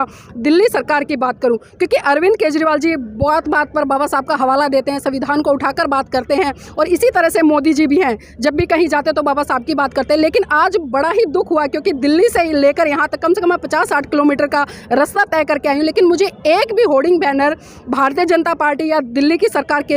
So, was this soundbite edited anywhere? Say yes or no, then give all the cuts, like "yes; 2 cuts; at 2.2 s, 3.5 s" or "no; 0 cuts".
no; 0 cuts